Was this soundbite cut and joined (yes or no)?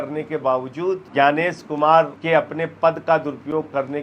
yes